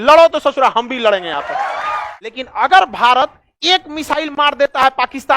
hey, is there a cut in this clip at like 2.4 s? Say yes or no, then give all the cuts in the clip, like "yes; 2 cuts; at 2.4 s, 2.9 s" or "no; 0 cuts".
yes; 1 cut; at 2.4 s